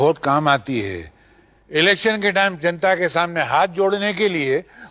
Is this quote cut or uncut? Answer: uncut